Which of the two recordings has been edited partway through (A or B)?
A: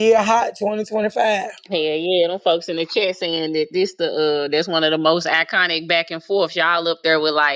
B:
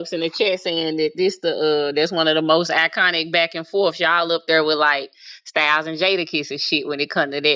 A